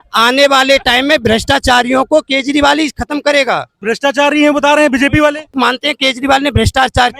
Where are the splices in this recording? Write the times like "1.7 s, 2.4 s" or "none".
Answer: 3.7 s, 5.5 s